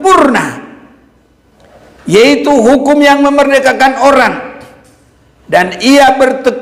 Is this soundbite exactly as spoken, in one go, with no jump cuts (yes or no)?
yes